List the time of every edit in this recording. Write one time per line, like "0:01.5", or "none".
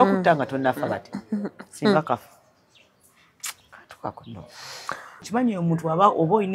0:05.1